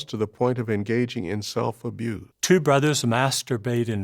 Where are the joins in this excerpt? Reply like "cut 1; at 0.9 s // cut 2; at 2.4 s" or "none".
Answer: cut 1; at 2.3 s